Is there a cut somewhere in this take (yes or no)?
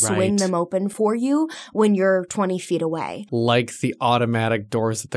yes